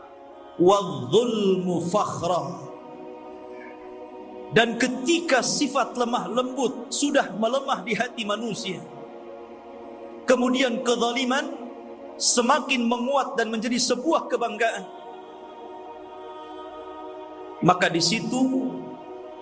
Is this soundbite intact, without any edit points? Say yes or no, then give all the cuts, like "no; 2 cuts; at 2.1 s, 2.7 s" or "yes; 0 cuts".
yes; 0 cuts